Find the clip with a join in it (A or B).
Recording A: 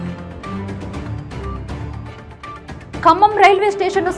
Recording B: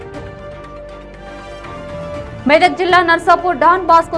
A